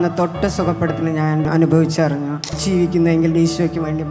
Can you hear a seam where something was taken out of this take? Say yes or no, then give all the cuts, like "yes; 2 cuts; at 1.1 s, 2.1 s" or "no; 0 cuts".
yes; 2 cuts; at 1.5 s, 2.6 s